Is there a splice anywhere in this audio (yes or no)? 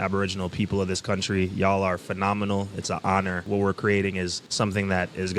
yes